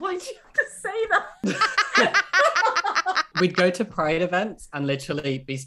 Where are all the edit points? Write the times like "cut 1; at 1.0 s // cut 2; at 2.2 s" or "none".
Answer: cut 1; at 1.3 s // cut 2; at 3.3 s